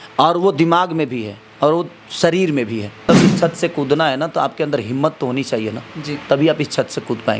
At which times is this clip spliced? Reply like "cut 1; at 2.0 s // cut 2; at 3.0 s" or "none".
cut 1; at 3.0 s